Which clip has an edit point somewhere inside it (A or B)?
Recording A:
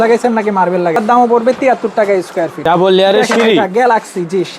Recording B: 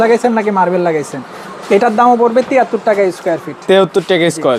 A